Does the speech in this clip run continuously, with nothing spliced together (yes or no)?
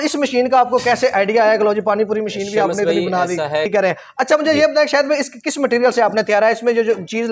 no